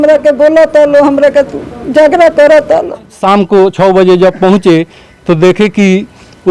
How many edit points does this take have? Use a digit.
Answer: 1